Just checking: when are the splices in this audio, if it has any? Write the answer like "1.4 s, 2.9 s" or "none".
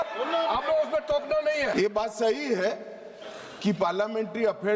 1.7 s

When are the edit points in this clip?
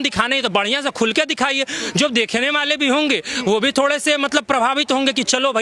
none

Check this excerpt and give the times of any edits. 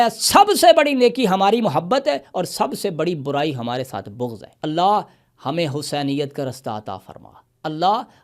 4.5 s

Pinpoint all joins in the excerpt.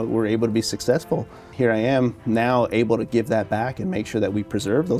1.5 s

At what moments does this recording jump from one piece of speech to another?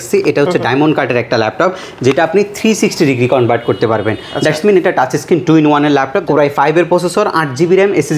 6.2 s

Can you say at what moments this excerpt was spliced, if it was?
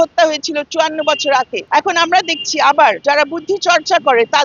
1.6 s, 3.0 s

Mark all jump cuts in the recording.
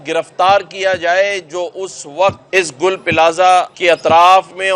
2.4 s, 3.7 s

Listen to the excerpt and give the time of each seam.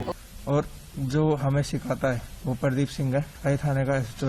2.3 s, 3.3 s

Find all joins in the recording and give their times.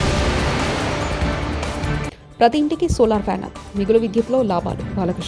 2.1 s

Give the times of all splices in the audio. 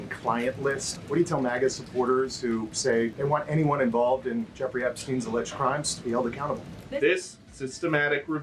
0.9 s, 3.1 s, 6.8 s

